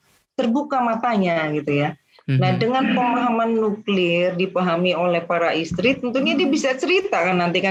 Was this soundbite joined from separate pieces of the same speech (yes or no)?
no